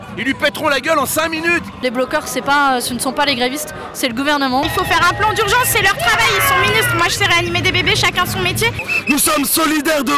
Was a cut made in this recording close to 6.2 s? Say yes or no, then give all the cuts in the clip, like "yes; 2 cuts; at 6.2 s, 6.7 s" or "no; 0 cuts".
no; 3 cuts; at 1.8 s, 4.6 s, 8.8 s